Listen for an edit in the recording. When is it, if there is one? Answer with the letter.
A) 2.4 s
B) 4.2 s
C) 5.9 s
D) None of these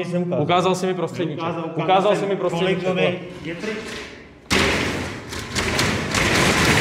D